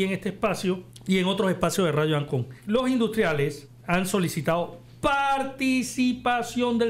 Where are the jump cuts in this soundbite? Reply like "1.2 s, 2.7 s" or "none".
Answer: 0.9 s, 2.6 s, 3.7 s